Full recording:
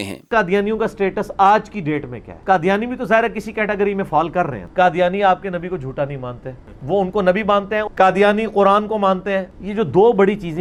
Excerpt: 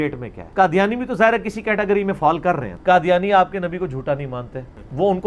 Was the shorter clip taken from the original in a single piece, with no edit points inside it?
yes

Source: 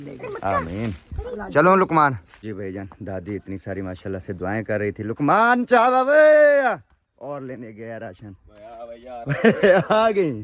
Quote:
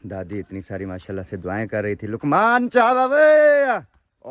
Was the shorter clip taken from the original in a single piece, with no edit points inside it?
yes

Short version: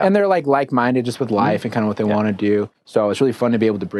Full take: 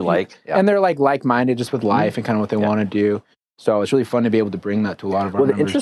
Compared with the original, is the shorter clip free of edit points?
no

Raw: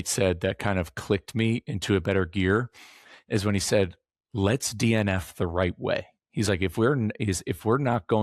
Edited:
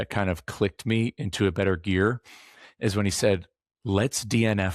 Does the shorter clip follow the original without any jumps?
yes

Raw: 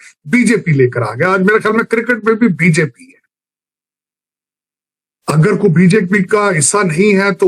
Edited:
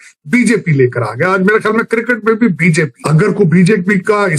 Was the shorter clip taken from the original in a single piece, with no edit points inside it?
no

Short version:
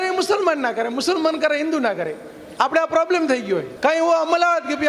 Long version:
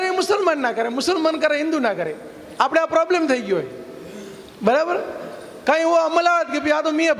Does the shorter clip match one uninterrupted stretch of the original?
no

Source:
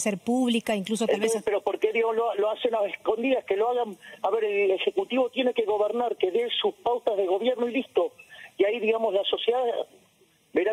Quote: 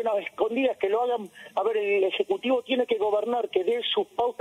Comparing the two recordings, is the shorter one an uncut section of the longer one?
yes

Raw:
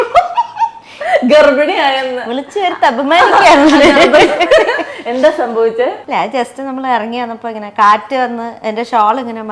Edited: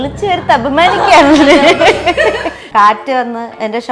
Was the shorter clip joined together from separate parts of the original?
yes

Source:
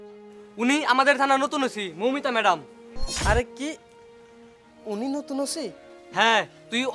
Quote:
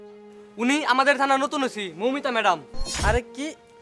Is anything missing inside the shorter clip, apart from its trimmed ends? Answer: yes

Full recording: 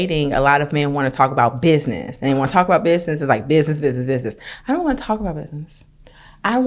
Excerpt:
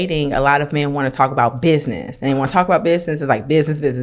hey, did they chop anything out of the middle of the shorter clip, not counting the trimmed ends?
no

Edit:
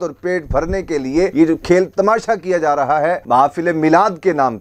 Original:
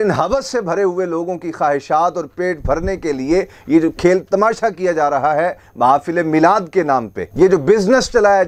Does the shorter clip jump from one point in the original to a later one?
yes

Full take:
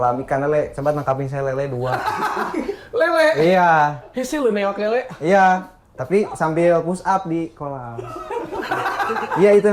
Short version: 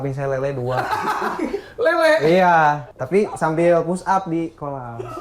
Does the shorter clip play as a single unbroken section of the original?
no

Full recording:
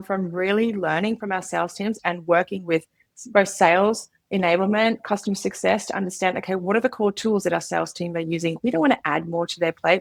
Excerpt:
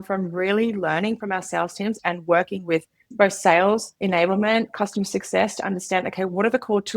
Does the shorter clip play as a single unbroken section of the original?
no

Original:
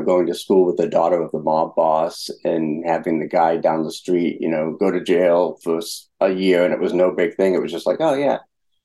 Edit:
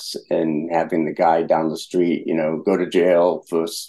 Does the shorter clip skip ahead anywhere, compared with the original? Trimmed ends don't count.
no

